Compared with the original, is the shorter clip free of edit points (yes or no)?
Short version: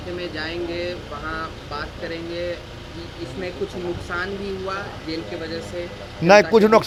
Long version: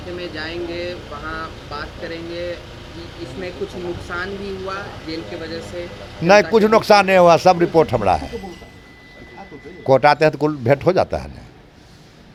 yes